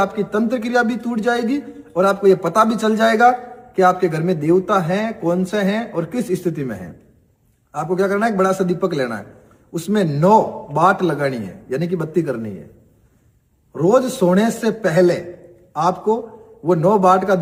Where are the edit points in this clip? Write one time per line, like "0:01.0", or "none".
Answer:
none